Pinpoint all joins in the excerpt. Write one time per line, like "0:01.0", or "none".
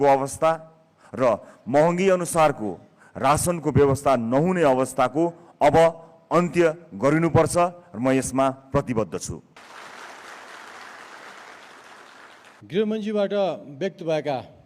0:09.6
0:12.5